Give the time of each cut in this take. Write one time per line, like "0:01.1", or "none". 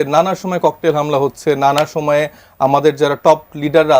none